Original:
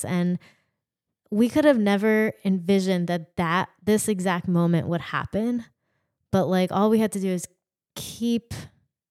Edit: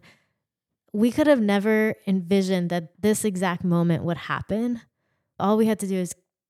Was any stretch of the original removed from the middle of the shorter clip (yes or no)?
yes